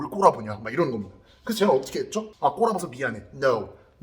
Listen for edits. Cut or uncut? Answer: cut